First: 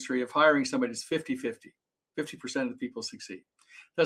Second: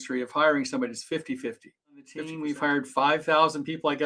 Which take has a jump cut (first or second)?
second